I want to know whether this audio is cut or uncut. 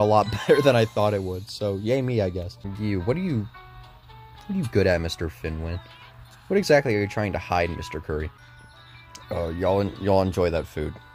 cut